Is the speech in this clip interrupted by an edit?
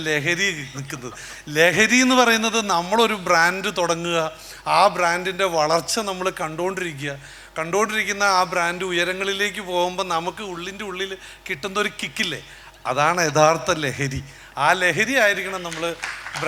no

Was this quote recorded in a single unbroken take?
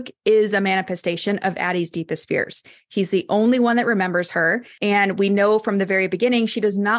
no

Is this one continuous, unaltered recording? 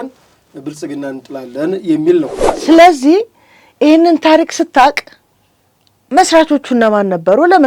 no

